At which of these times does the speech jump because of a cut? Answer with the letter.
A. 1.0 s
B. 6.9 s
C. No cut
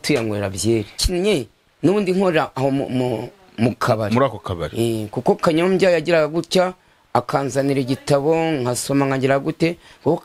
A